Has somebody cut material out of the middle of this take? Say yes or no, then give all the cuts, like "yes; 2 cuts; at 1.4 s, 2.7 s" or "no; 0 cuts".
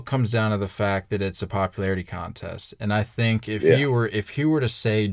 no; 0 cuts